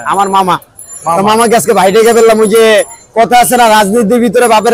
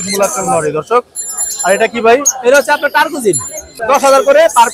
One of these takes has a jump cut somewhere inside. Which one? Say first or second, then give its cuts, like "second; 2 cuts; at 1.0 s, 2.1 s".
second; 1 cut; at 3.8 s